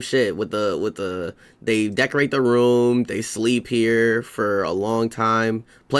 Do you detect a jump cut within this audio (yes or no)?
no